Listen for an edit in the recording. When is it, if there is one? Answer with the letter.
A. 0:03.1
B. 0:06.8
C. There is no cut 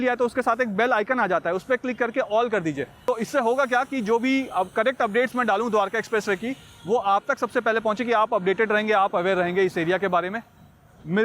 A